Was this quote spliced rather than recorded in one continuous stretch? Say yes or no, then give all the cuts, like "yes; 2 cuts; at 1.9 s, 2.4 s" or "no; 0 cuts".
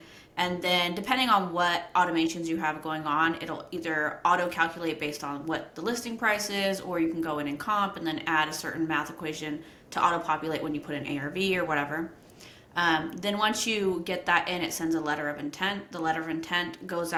no; 0 cuts